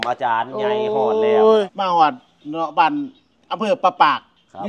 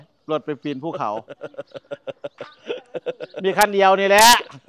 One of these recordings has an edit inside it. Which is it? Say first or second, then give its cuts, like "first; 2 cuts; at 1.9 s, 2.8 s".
first; 1 cut; at 1.7 s